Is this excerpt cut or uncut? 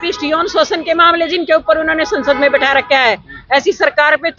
uncut